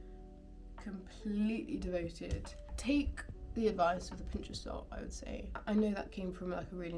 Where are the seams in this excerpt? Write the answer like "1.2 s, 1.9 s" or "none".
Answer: 2.7 s, 5.6 s